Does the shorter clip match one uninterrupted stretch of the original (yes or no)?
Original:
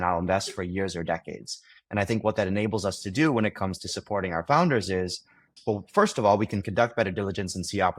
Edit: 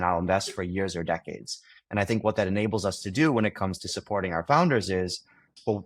yes